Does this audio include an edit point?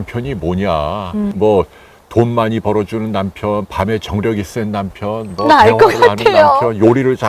yes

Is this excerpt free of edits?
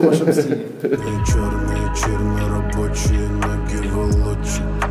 no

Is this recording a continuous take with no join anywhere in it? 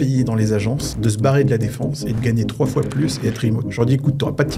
no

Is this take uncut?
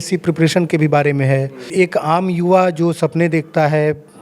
no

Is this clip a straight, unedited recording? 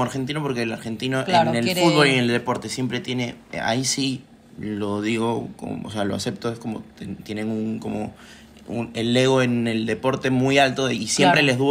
yes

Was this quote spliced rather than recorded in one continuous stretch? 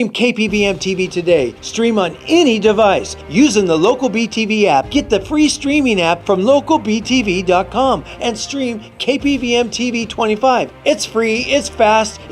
yes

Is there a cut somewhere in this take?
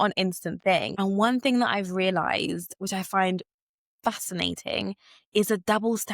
yes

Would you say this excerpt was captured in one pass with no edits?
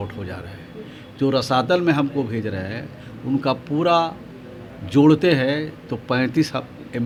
yes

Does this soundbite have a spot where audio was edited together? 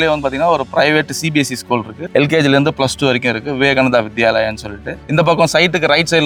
no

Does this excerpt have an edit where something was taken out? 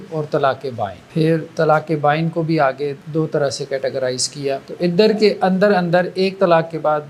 yes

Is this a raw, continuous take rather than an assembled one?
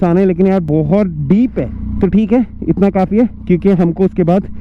yes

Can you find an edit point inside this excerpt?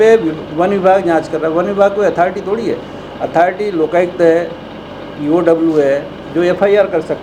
no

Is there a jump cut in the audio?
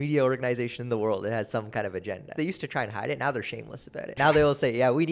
yes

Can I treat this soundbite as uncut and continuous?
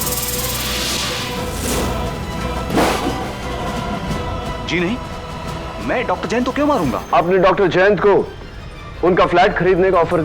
no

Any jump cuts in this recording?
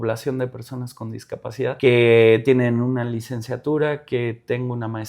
yes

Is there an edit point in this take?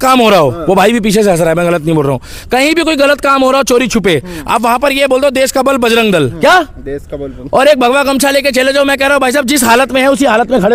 no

